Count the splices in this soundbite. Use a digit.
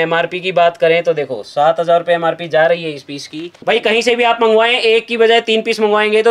1